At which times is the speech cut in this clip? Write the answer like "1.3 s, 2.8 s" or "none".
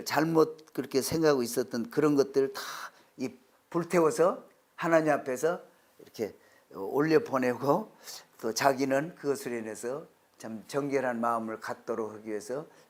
none